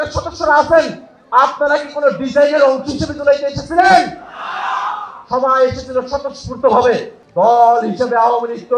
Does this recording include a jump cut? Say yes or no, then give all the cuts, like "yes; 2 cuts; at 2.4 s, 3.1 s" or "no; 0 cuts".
yes; 1 cut; at 7.2 s